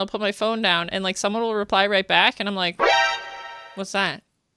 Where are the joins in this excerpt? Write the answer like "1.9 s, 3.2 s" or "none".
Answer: none